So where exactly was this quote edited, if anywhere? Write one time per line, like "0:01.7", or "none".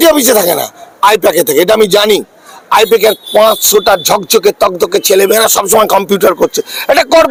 none